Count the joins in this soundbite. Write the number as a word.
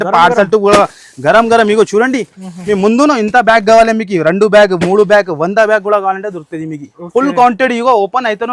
zero